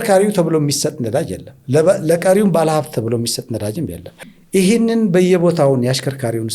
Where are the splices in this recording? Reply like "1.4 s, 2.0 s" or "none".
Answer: 4.1 s